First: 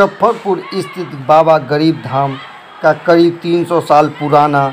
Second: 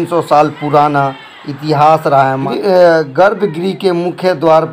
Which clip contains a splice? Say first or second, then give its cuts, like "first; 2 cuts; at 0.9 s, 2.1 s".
second; 1 cut; at 2.4 s